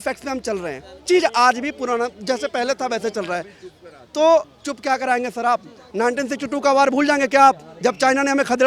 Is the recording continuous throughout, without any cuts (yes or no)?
no